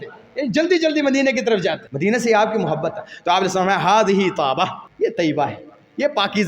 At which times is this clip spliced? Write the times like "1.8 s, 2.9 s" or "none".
1.9 s, 4.8 s